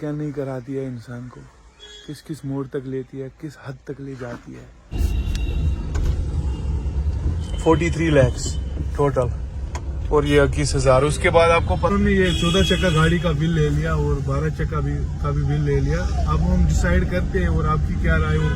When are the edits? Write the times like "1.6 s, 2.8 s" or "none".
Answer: 4.9 s, 11.9 s